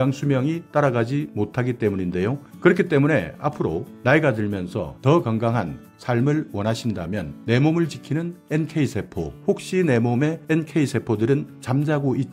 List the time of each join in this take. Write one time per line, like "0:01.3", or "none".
0:10.4

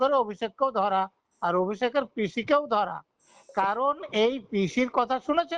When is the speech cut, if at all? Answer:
none

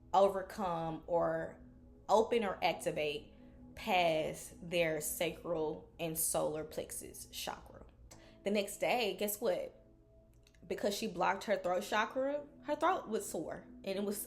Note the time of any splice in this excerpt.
0:08.1

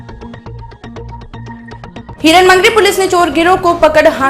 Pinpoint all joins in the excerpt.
0:02.1

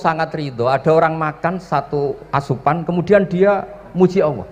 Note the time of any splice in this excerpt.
none

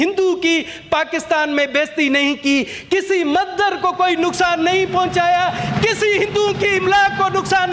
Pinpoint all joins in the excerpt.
none

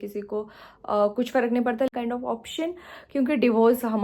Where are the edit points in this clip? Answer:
0:01.9

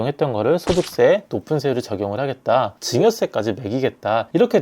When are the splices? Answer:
0:02.7

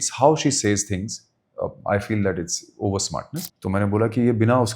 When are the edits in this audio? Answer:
0:03.4

